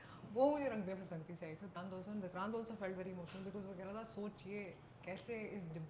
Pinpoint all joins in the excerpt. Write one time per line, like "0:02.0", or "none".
0:01.7